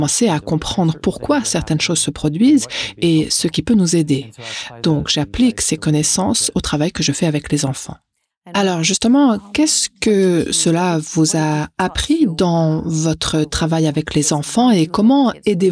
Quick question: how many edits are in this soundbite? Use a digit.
0